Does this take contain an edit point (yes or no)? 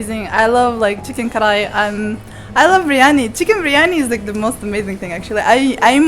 no